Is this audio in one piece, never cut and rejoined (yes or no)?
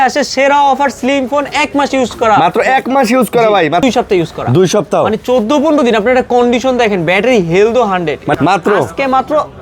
no